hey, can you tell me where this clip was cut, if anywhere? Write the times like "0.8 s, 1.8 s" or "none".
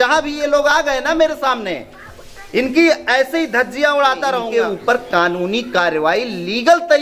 4.5 s